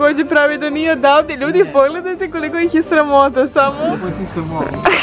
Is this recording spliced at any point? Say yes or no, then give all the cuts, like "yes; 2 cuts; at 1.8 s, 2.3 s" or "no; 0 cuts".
yes; 1 cut; at 4.0 s